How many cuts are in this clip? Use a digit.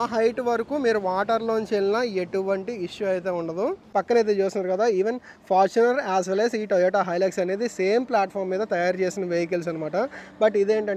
1